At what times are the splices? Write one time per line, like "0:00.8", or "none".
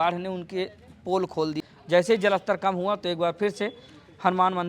0:01.6